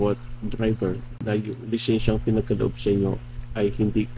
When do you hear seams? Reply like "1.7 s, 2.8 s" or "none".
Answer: 1.1 s

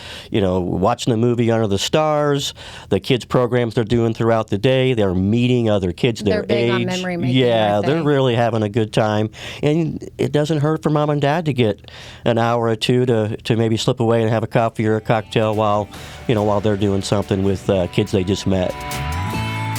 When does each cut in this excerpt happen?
18.9 s

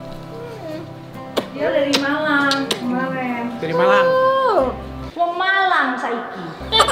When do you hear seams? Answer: none

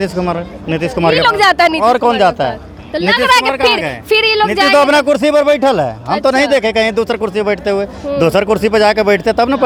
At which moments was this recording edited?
none

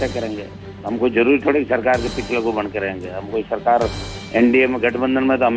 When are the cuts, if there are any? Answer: none

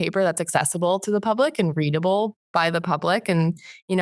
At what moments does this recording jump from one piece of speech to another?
none

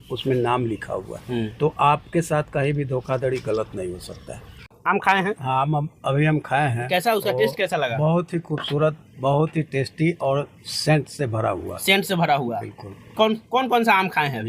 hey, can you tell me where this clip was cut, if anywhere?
4.8 s

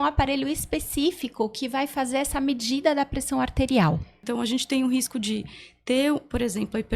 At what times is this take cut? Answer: 4.2 s

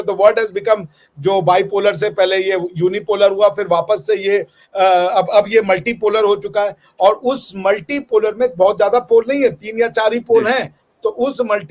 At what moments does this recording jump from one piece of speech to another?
none

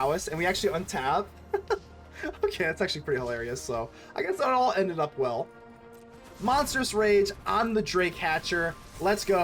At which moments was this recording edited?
6.3 s

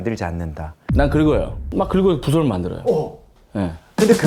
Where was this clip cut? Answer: 1.6 s

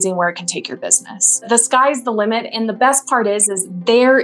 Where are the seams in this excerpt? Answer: 1.4 s

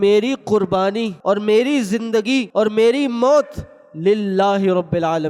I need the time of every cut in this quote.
1.1 s, 2.5 s

